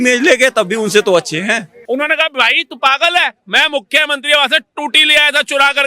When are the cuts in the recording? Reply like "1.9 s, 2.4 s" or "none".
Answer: 1.7 s